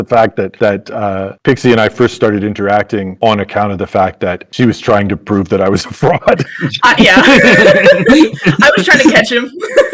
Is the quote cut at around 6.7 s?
no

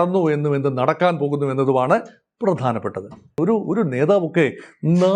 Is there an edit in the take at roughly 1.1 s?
no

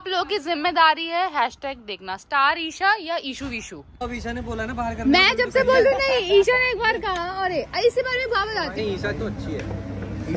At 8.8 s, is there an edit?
yes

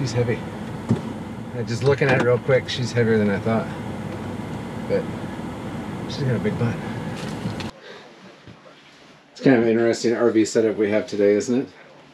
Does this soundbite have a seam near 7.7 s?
yes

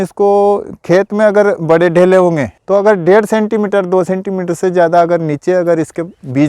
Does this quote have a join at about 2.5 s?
yes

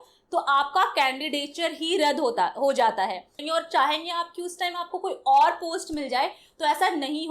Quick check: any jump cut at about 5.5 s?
no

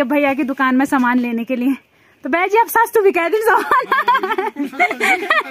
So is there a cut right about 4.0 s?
no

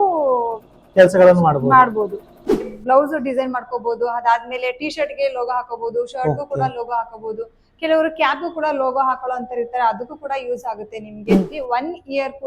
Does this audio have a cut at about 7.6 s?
no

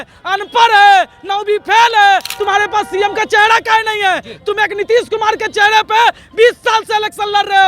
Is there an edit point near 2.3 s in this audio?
yes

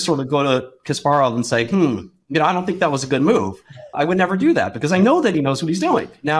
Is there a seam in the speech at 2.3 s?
no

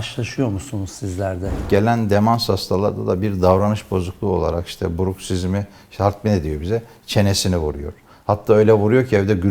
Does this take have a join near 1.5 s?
yes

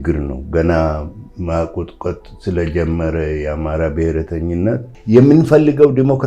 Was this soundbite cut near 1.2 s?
no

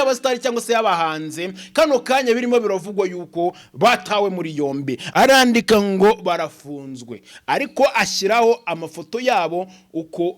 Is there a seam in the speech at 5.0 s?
yes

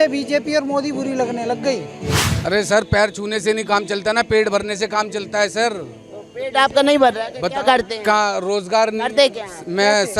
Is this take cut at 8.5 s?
no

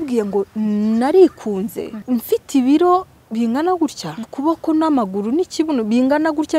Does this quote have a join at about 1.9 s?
yes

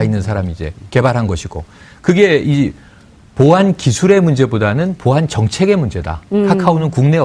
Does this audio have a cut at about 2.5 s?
yes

